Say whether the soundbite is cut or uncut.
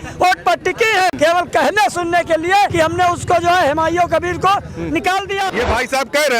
cut